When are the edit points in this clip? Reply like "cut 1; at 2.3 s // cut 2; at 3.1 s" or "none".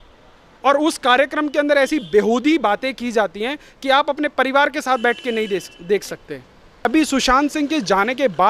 cut 1; at 6.8 s